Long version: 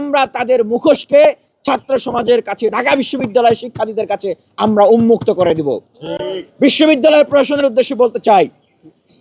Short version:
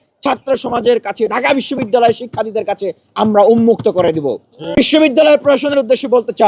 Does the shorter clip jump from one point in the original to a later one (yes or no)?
yes